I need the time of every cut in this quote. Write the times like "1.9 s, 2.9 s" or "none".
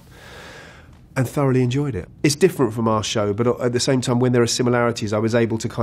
2.0 s